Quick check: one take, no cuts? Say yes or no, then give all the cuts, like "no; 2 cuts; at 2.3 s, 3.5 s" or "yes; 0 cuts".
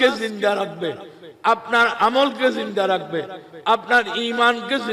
yes; 0 cuts